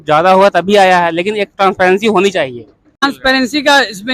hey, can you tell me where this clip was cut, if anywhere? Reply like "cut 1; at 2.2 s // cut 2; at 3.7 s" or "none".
cut 1; at 3.0 s